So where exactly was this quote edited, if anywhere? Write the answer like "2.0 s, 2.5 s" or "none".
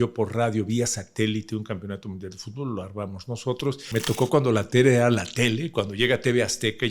3.8 s